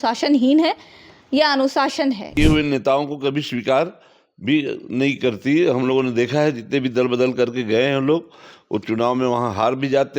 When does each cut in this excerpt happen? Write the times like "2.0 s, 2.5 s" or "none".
2.2 s